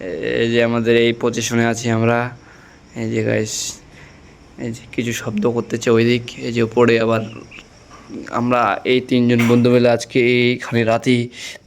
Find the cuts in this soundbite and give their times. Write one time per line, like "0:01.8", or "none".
none